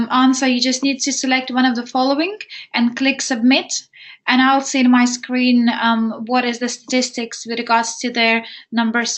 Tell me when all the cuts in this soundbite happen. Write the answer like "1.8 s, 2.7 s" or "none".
none